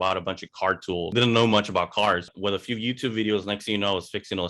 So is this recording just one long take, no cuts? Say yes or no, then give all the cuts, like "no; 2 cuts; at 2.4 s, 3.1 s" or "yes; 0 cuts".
no; 2 cuts; at 1.1 s, 2.3 s